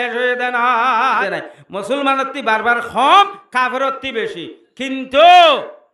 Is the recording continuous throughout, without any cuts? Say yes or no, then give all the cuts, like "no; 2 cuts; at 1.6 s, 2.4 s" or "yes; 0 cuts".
no; 1 cut; at 1.2 s